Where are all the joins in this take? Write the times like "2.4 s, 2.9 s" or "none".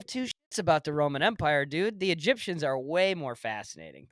none